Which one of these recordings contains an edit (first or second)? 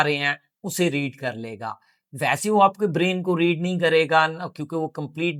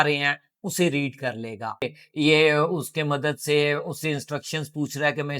second